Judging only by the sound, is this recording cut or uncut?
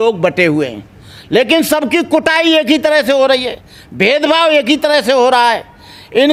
uncut